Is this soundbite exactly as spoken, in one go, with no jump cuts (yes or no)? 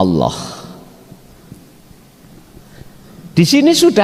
yes